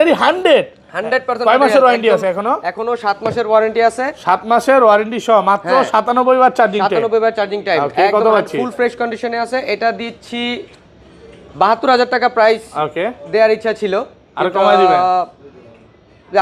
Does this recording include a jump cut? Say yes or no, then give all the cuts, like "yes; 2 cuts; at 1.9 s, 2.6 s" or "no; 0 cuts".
no; 0 cuts